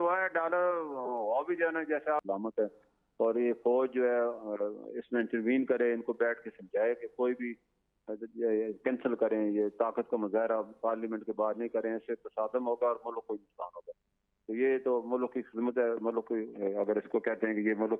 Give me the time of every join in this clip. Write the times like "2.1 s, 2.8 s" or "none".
2.2 s